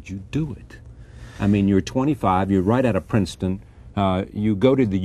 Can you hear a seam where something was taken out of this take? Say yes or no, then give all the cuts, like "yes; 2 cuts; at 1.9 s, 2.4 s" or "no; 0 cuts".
yes; 1 cut; at 3.3 s